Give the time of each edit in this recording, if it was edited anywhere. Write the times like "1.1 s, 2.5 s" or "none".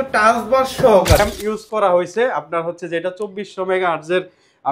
1.2 s